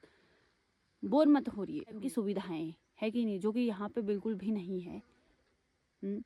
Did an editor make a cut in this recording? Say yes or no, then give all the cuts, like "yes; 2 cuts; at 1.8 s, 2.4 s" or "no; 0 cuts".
yes; 1 cut; at 2.0 s